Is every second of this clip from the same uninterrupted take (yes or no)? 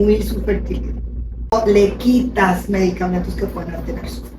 no